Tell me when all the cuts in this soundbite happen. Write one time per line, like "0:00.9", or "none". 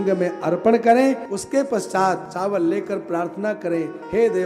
0:01.3
0:02.3